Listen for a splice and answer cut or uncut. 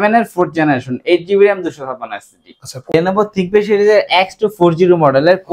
cut